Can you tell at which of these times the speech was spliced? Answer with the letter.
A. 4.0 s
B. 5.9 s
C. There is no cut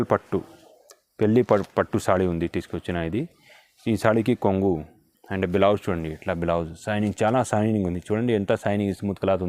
C